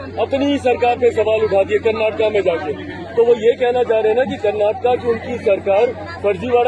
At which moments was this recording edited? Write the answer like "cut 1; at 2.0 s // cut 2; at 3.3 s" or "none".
none